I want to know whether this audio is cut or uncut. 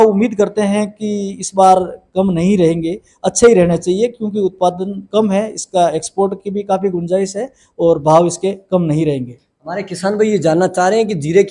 uncut